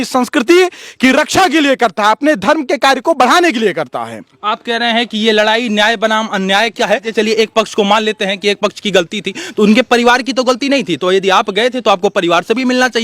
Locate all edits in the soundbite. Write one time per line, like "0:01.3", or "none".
none